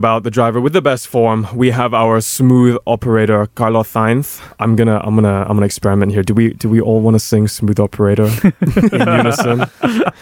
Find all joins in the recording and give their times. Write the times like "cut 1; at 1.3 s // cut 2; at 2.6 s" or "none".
cut 1; at 4.4 s